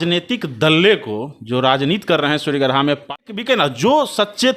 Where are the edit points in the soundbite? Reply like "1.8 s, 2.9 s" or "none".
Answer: 3.3 s